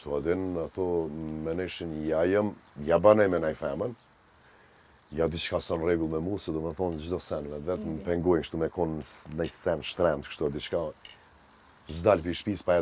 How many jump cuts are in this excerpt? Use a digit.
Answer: 0